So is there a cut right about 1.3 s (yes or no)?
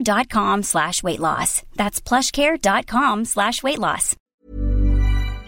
no